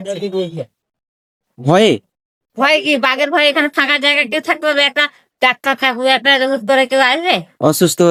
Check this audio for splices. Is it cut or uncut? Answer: uncut